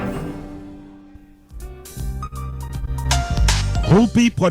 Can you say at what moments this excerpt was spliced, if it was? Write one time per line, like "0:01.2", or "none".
0:01.7